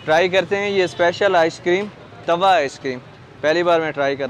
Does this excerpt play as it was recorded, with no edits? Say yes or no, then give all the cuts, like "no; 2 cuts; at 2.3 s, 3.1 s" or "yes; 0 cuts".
yes; 0 cuts